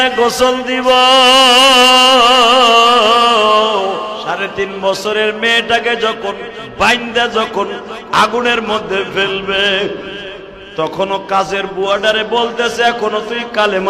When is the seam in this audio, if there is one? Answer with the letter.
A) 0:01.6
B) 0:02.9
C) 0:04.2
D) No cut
C